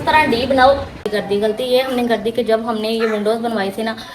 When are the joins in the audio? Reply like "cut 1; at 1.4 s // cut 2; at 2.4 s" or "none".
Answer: cut 1; at 1.1 s